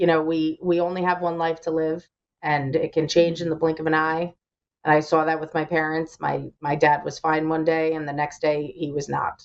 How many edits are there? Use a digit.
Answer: 0